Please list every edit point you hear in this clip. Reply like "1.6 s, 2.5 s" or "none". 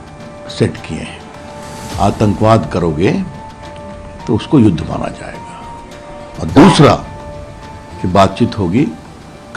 none